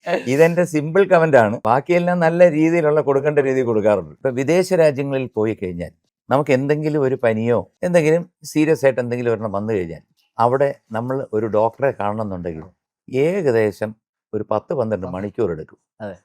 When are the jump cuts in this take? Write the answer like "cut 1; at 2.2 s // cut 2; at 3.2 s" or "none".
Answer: cut 1; at 1.6 s // cut 2; at 4.1 s // cut 3; at 7.7 s // cut 4; at 8.4 s